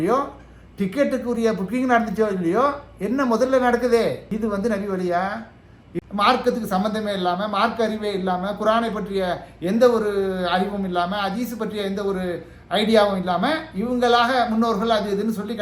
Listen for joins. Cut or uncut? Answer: cut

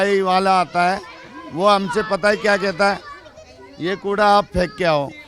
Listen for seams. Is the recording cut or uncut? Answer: uncut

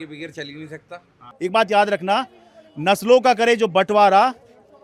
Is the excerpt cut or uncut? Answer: cut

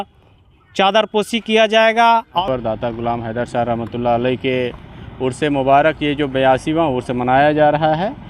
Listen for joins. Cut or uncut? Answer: cut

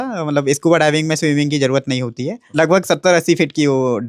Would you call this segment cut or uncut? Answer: cut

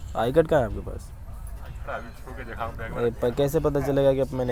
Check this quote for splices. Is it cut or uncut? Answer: uncut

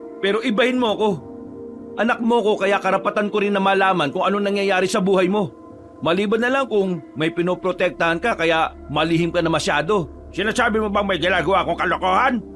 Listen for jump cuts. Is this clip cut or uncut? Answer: uncut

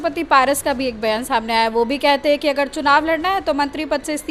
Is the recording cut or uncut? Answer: uncut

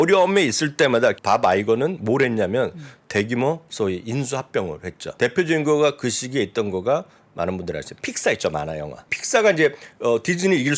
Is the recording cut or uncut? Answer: cut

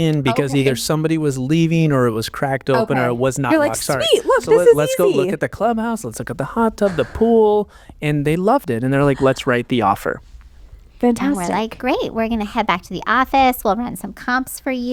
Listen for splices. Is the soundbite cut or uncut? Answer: uncut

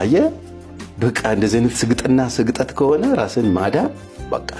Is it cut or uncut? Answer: uncut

